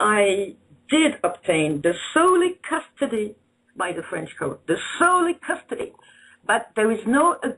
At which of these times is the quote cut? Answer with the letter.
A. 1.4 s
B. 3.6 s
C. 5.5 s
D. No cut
C